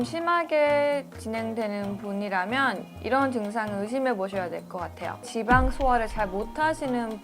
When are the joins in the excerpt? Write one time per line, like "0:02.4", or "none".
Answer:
0:05.3